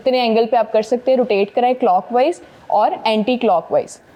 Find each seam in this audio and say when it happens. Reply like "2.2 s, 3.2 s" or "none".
none